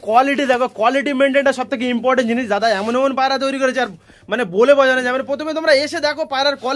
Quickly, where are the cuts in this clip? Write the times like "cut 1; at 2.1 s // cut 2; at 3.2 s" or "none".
none